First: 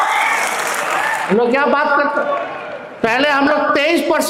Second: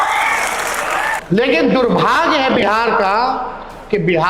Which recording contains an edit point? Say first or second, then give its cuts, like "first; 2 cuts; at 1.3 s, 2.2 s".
second; 1 cut; at 1.2 s